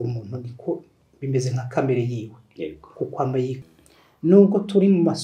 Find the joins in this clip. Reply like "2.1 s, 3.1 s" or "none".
3.6 s